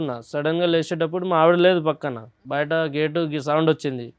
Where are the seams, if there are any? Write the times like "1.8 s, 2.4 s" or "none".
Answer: 2.4 s